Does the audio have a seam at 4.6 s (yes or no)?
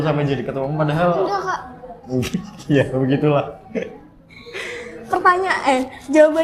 no